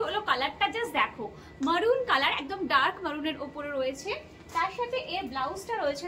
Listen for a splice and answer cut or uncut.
uncut